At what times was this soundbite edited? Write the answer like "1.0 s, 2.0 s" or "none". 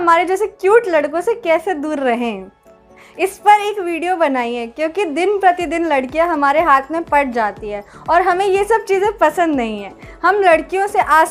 none